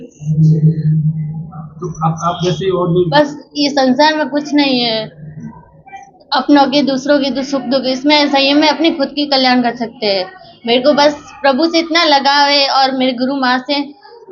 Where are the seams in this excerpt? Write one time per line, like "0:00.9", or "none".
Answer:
0:03.1